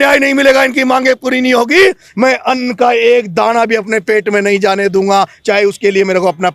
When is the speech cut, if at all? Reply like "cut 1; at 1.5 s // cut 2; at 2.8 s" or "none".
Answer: none